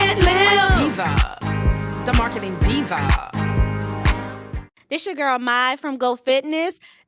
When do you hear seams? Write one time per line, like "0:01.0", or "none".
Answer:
0:02.4
0:04.7